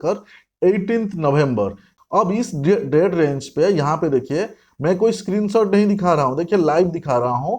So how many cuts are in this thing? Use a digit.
1